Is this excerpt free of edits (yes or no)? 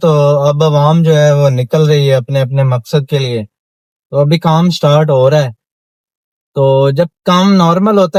yes